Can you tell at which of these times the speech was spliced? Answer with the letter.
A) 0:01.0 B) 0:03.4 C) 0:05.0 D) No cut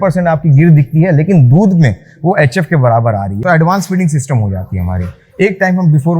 B